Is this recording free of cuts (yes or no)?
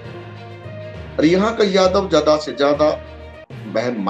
yes